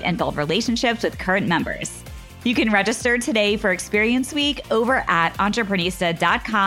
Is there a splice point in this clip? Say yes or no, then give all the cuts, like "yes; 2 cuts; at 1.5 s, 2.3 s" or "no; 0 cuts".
no; 0 cuts